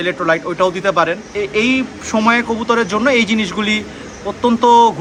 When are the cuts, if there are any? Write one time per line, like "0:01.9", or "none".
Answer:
none